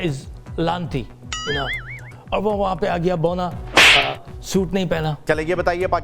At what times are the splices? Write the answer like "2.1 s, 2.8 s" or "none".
2.0 s, 5.2 s